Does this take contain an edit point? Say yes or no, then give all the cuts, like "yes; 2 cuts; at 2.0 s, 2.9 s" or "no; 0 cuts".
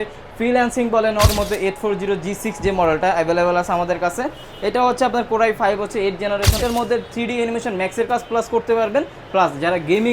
yes; 2 cuts; at 1.3 s, 6.6 s